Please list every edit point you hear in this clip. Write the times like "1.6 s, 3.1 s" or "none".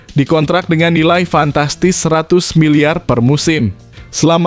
none